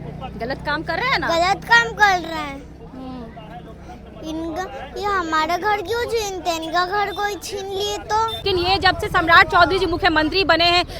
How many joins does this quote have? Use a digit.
1